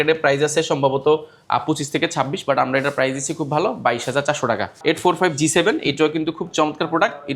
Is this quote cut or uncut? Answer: cut